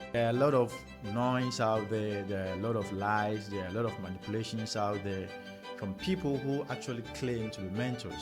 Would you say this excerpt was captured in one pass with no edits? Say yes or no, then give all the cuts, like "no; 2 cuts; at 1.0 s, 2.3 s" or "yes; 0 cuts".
yes; 0 cuts